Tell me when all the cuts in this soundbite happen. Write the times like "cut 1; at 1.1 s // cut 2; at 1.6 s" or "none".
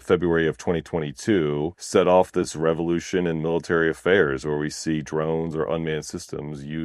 cut 1; at 1.8 s